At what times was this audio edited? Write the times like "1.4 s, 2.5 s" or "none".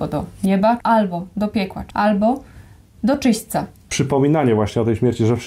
0.8 s, 1.8 s, 3.9 s